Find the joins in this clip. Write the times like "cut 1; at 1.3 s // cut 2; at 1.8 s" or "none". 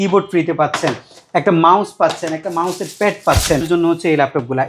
cut 1; at 3.6 s